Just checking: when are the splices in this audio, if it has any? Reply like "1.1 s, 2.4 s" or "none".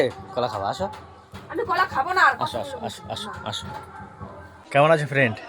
4.6 s